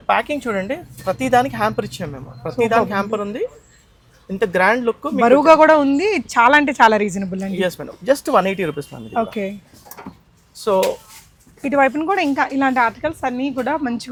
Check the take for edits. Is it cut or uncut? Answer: uncut